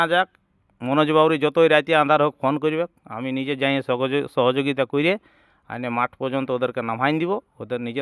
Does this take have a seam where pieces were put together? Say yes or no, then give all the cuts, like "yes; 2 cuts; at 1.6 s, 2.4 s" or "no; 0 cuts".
no; 0 cuts